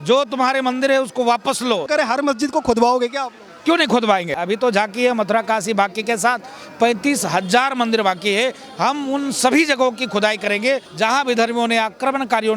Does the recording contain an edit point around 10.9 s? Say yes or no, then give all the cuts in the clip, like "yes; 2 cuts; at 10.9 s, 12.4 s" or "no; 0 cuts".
yes; 3 cuts; at 1.9 s, 4.4 s, 10.9 s